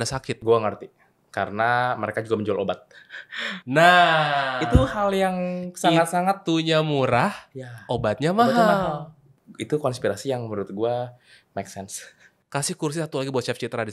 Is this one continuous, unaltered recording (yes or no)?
yes